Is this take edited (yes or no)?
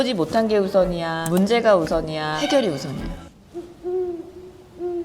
yes